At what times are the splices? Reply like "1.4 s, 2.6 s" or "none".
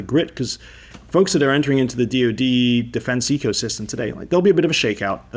none